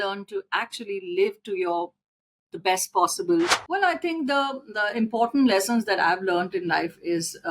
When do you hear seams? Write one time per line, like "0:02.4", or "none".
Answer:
0:03.6